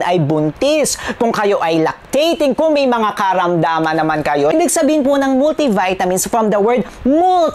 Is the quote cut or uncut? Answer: cut